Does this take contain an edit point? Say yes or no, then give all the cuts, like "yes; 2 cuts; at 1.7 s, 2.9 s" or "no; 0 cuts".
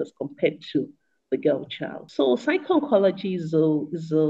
yes; 1 cut; at 2.0 s